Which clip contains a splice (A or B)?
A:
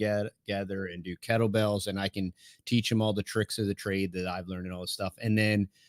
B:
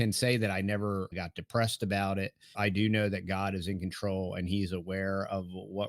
B